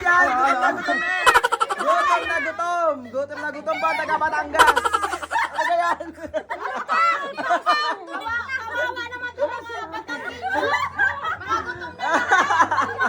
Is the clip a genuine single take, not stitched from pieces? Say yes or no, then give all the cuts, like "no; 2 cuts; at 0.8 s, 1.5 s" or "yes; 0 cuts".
yes; 0 cuts